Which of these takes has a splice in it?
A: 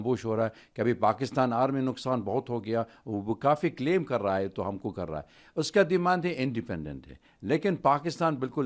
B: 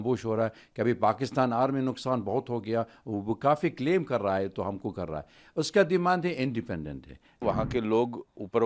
B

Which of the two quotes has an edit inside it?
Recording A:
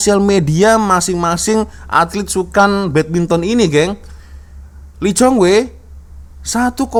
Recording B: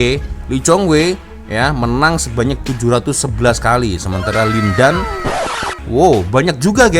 B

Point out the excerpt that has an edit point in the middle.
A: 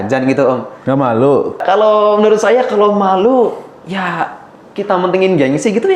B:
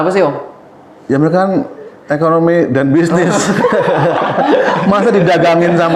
A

